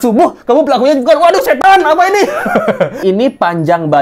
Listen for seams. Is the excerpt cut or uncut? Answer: cut